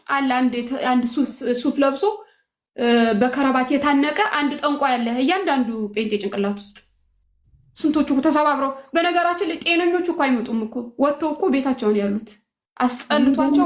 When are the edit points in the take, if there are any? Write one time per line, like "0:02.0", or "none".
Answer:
none